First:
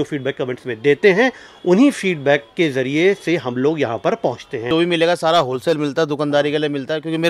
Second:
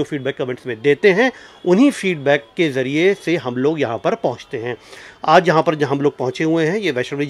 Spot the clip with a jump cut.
first; 1 cut; at 4.7 s

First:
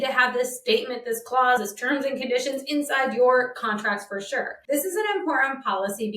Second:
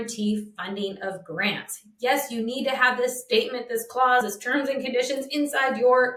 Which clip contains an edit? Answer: first; 1 cut; at 4.6 s

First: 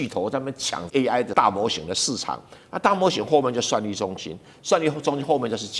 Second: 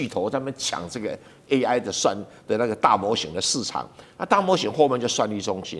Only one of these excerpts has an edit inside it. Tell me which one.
first; 1 cut; at 1.3 s

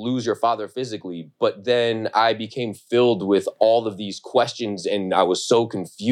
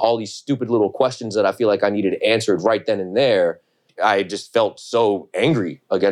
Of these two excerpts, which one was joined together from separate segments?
second; 1 cut; at 3.9 s

